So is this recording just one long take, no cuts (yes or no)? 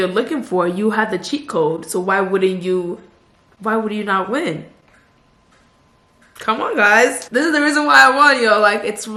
yes